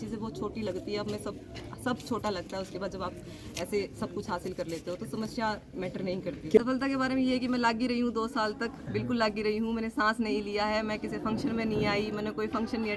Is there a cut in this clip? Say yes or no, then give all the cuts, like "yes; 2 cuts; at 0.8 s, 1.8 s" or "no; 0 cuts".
yes; 1 cut; at 6.6 s